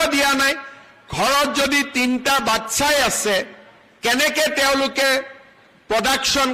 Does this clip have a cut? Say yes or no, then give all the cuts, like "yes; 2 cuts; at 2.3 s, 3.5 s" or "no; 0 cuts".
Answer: yes; 1 cut; at 2.4 s